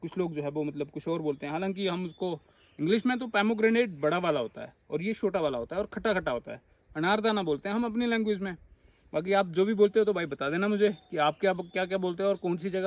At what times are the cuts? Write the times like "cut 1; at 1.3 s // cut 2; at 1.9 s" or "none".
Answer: none